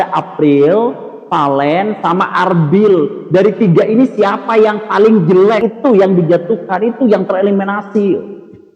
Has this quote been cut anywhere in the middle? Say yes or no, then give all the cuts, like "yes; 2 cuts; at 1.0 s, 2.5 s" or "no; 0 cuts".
yes; 1 cut; at 5.6 s